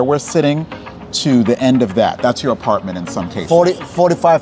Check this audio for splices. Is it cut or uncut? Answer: uncut